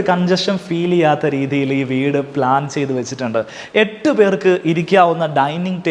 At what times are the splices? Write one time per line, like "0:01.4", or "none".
none